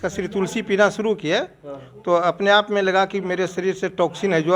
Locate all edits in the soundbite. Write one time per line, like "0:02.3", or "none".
none